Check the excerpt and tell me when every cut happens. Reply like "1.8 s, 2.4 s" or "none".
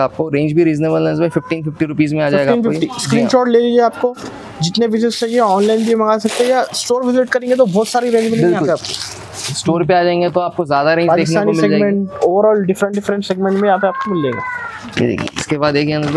none